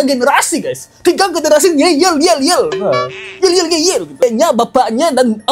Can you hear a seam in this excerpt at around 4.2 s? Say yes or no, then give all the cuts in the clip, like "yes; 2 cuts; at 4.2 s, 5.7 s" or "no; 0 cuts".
yes; 1 cut; at 4.2 s